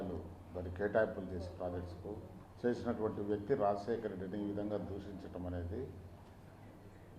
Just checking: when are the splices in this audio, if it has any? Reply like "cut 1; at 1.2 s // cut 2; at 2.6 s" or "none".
cut 1; at 2.4 s